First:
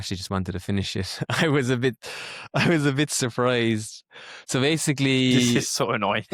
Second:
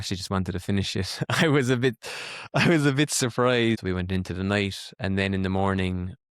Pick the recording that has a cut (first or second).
second